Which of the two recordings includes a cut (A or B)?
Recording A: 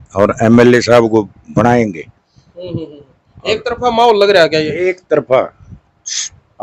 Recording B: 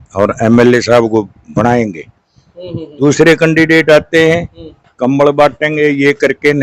B